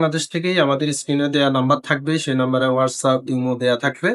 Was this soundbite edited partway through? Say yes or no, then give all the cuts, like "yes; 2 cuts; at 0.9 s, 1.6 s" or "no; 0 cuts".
no; 0 cuts